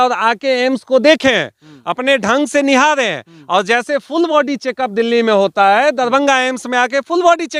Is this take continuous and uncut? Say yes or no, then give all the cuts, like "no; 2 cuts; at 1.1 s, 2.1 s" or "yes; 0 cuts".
yes; 0 cuts